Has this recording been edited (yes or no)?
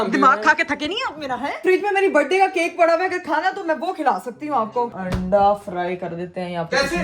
yes